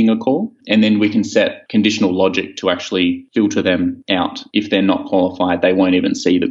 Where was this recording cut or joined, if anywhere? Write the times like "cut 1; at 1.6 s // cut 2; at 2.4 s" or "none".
cut 1; at 4.4 s

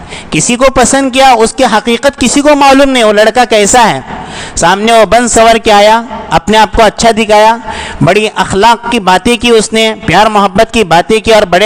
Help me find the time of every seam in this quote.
none

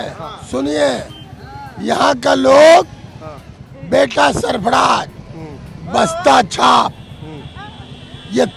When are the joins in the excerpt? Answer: none

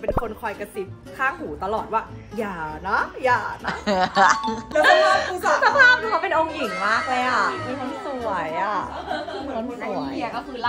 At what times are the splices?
cut 1; at 4.5 s

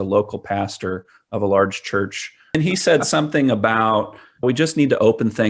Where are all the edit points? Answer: cut 1; at 2.6 s

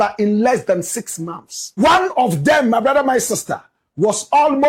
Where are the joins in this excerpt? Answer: cut 1; at 1.8 s

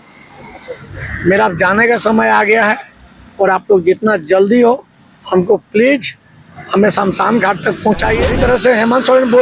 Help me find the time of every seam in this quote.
cut 1; at 8.3 s

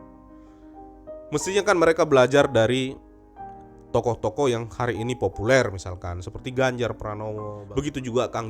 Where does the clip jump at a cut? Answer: cut 1; at 7.6 s

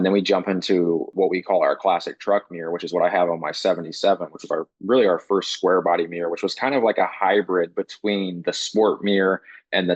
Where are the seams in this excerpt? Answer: cut 1; at 1.1 s

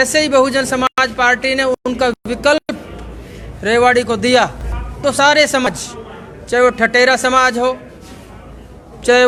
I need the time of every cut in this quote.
none

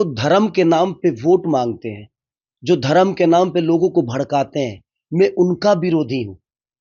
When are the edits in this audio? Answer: none

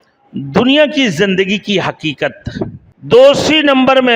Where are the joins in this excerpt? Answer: cut 1; at 2.9 s

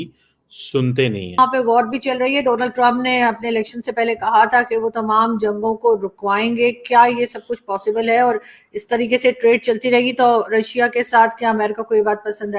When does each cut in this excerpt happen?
cut 1; at 1.4 s

